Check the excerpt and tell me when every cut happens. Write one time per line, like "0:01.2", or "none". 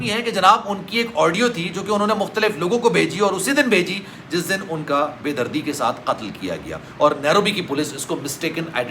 none